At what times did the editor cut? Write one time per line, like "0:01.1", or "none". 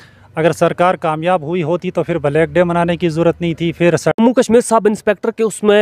0:04.2